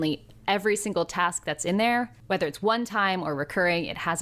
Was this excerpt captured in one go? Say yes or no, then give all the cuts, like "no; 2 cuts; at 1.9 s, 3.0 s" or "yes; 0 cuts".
no; 1 cut; at 2.2 s